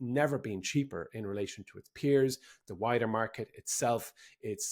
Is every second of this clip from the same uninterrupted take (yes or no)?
yes